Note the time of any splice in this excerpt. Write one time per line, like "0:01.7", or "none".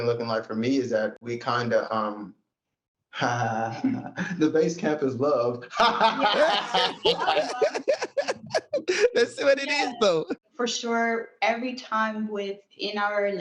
0:10.4